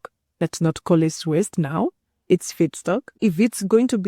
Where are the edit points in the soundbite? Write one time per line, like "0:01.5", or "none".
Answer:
0:03.1